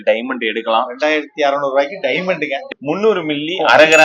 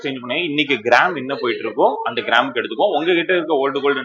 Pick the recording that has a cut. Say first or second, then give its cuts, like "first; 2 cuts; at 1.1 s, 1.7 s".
first; 1 cut; at 2.6 s